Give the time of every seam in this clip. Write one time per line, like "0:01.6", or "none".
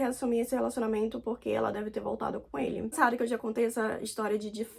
0:02.9